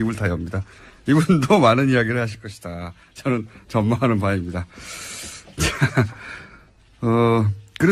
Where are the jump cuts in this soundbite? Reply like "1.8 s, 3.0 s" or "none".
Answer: 1.4 s